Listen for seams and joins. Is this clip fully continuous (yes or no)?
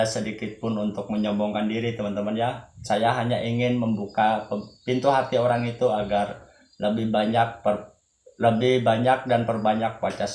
yes